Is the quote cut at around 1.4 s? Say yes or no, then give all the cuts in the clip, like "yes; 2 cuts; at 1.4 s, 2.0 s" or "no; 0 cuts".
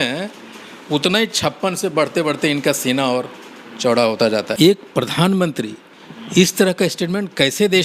no; 1 cut; at 4.5 s